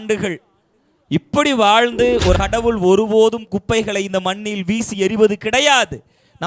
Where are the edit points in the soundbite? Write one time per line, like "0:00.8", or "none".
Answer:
0:02.4